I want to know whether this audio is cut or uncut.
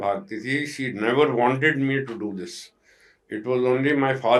uncut